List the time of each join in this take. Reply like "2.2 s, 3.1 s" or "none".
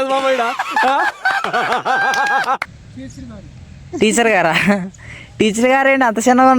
2.8 s